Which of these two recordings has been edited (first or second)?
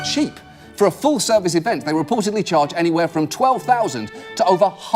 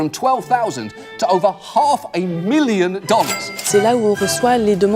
second